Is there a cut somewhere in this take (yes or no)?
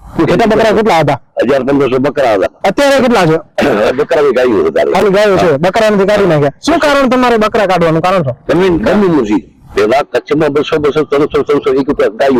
no